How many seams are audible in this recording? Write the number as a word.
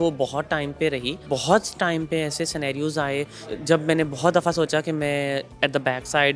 zero